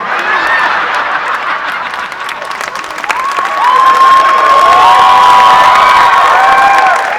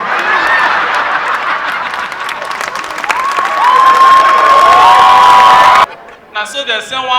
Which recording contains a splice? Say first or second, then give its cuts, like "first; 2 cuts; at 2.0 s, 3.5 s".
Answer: second; 1 cut; at 5.9 s